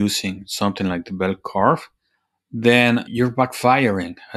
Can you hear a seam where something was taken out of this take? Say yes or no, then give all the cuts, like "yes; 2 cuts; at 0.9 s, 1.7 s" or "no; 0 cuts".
yes; 1 cut; at 3.1 s